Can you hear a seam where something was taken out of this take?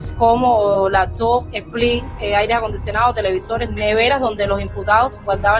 yes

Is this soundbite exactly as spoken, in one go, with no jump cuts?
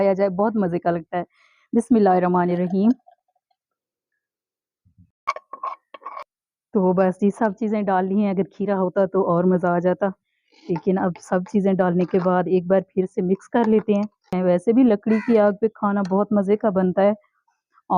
no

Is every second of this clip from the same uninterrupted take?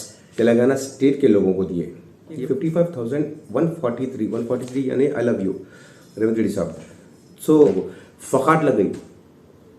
no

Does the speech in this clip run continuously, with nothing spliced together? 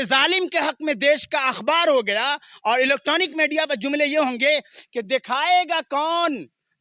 yes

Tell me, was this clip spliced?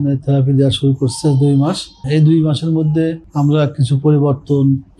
yes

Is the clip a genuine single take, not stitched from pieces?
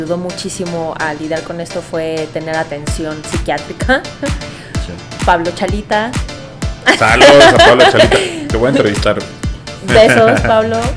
yes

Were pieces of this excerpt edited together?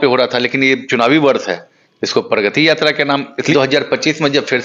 yes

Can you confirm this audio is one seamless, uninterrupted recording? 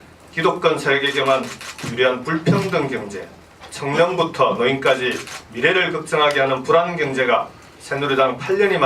no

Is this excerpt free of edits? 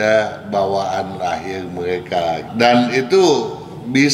no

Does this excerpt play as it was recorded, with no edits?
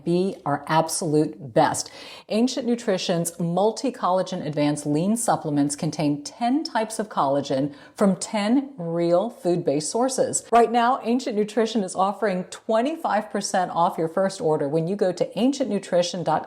no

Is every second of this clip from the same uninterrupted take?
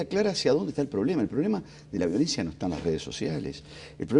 no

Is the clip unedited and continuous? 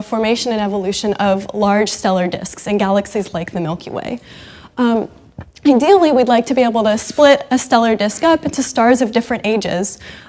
no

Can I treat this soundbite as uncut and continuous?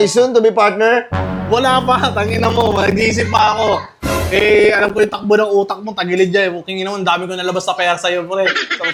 yes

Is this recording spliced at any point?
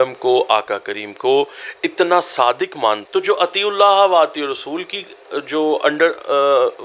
yes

